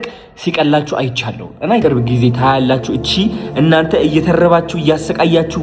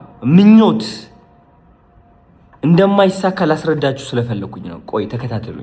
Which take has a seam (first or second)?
first